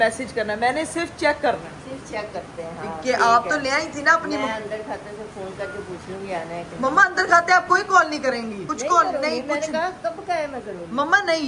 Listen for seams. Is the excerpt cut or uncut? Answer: uncut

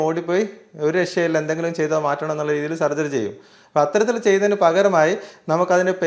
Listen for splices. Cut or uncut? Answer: uncut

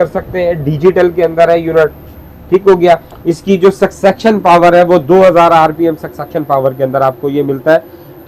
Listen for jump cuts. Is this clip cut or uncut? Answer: uncut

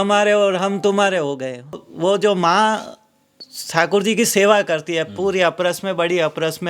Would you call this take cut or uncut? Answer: cut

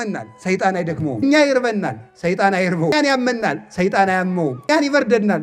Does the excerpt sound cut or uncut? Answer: cut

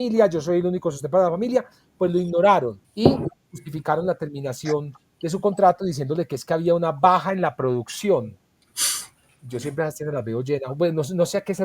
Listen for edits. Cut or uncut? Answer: cut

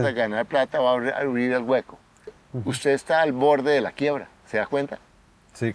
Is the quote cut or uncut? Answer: cut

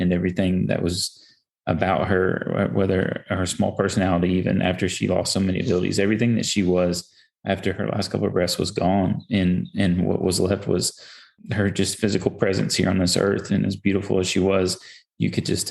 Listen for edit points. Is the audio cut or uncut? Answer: cut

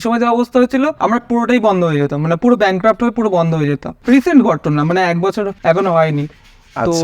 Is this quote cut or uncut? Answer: cut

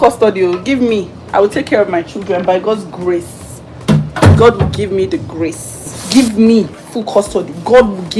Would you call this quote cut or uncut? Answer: cut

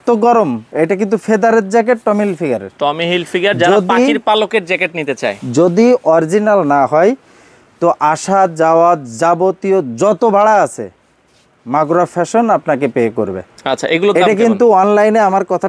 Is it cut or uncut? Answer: uncut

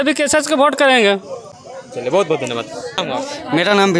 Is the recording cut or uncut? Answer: uncut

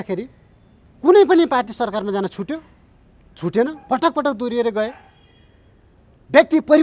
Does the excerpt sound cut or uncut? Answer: uncut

